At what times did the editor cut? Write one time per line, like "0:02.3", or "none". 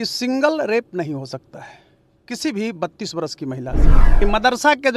0:04.0